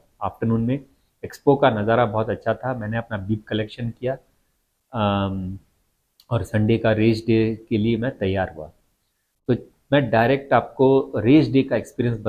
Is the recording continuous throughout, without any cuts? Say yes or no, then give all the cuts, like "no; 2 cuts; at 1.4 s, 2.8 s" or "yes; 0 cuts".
yes; 0 cuts